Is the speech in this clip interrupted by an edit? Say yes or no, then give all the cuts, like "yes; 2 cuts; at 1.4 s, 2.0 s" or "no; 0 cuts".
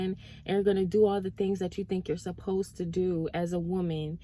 no; 0 cuts